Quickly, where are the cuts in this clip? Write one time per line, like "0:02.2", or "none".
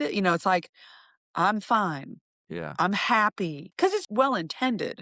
0:03.6